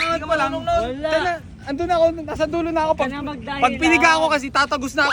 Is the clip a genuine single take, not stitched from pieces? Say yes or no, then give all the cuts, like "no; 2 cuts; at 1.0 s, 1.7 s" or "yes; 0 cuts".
yes; 0 cuts